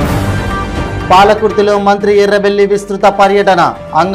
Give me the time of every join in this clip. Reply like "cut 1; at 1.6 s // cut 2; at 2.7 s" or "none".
cut 1; at 1.0 s